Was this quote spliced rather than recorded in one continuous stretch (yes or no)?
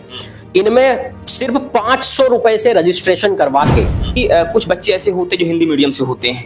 yes